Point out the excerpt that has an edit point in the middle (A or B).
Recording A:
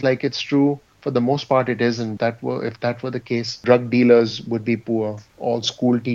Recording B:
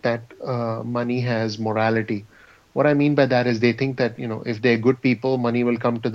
A